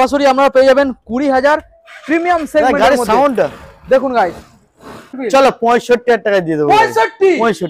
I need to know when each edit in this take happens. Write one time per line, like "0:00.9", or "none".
0:05.1